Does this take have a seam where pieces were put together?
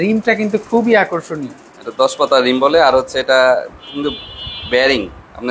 no; 0 cuts

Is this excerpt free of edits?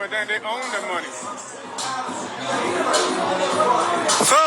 no; 1 cut; at 1.9 s

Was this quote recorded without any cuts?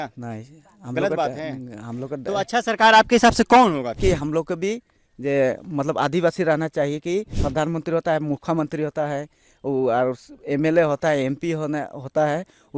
no; 2 cuts; at 4.0 s, 7.4 s

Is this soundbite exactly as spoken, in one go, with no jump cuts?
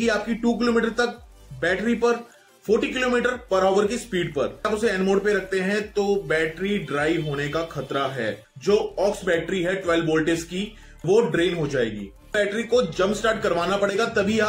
no; 3 cuts; at 4.7 s, 8.5 s, 12.3 s

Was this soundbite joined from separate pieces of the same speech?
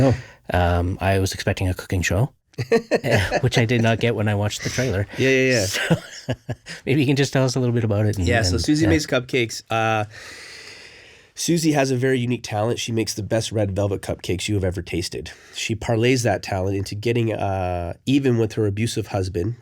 no; 0 cuts

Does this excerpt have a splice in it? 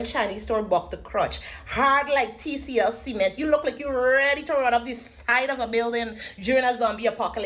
no; 0 cuts

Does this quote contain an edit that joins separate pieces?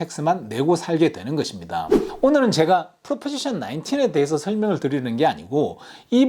yes; 1 cut; at 2.0 s

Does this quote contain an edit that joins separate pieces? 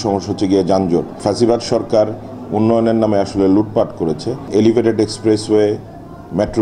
yes; 2 cuts; at 1.1 s, 4.5 s

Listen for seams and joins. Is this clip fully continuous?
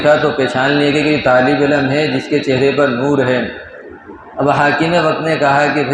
yes; 0 cuts

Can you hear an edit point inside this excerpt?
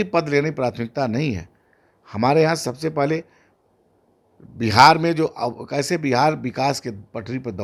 no; 0 cuts

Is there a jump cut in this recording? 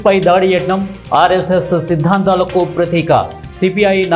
no; 0 cuts

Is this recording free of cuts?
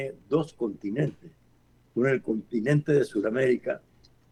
yes; 0 cuts

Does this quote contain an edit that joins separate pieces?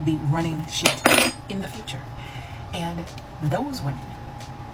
no; 0 cuts

